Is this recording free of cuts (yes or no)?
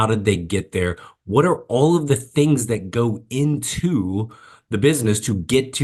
yes